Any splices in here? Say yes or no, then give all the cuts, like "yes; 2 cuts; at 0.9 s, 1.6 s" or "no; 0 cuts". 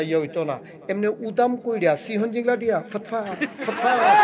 no; 0 cuts